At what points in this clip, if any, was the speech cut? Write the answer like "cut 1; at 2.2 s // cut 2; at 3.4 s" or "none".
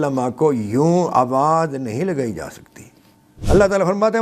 cut 1; at 3.3 s